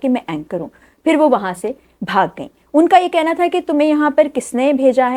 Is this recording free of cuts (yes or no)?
yes